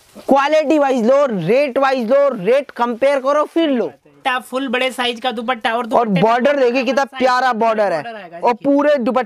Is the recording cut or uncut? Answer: cut